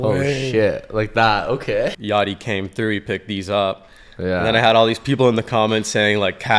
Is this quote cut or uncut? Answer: cut